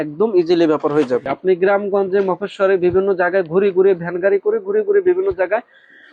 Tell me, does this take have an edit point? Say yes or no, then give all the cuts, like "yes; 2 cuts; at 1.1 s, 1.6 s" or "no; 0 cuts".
yes; 1 cut; at 1.3 s